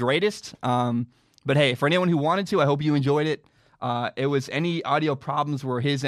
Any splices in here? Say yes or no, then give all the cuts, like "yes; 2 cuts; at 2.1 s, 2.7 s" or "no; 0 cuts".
no; 0 cuts